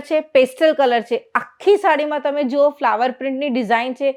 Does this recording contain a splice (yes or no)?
no